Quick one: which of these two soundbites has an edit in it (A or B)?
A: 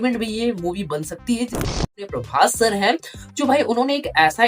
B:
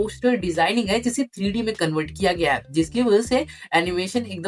A